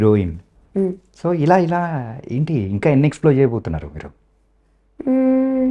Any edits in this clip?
no; 0 cuts

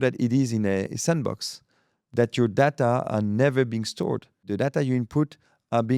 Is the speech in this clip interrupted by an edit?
yes; 2 cuts; at 0.9 s, 4.5 s

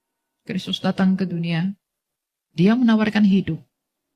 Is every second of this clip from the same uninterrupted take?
yes; 0 cuts

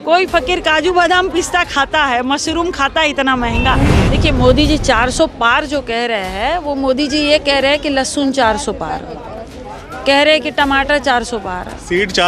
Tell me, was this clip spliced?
yes; 1 cut; at 4.1 s

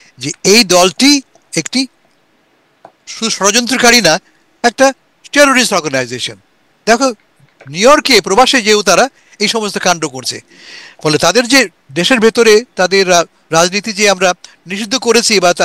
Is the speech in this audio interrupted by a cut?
no; 0 cuts

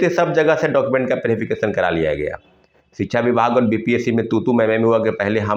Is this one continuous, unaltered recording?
yes; 0 cuts

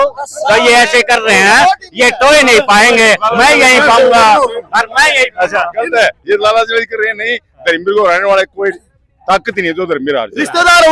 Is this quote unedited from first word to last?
yes; 0 cuts

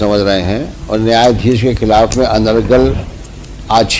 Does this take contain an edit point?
no; 0 cuts

